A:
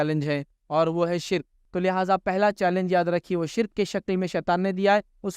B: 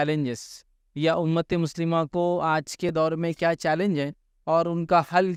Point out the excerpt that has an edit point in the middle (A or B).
A